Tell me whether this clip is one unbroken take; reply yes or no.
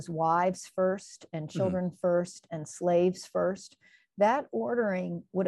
yes